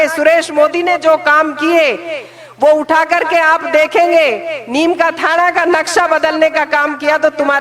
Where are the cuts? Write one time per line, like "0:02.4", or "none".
none